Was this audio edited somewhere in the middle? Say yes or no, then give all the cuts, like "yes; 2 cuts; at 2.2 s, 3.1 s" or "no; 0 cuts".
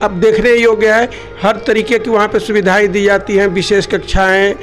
no; 0 cuts